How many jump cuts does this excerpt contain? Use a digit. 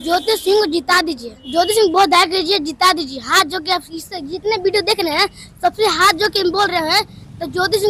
1